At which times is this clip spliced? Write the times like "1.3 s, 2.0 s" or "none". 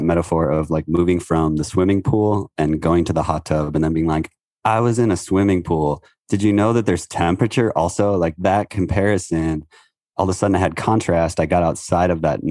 none